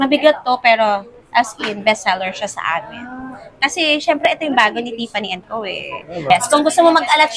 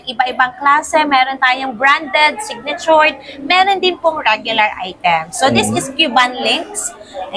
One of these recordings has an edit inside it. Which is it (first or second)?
first